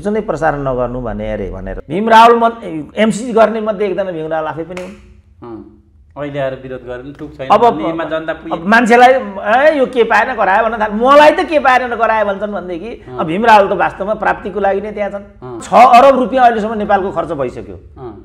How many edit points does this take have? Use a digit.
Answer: 2